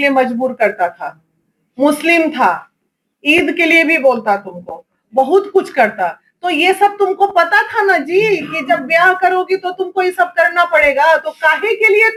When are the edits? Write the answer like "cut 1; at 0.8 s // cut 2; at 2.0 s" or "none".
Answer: none